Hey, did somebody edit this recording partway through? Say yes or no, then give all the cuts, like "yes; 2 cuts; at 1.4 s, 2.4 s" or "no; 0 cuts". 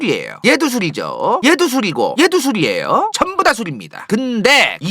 yes; 1 cut; at 3.1 s